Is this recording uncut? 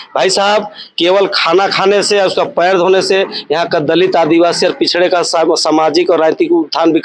yes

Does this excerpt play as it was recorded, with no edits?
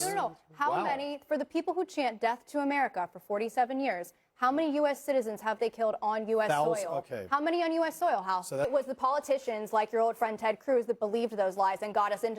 no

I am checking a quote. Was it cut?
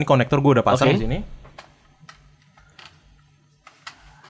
no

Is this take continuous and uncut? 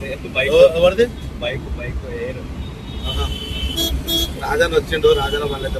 yes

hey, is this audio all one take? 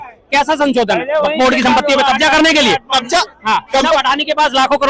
no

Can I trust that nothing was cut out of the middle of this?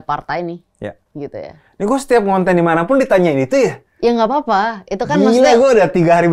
yes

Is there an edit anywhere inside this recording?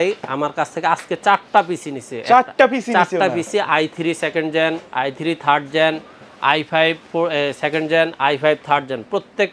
no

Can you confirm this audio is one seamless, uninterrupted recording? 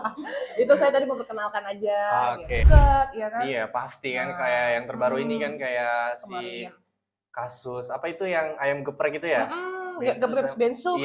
no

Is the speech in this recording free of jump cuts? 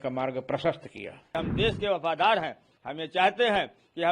no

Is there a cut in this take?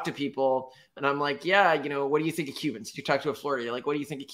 no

